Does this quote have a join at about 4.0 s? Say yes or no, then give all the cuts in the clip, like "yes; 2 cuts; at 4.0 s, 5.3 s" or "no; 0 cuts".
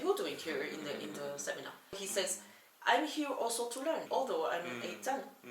yes; 2 cuts; at 2.0 s, 4.0 s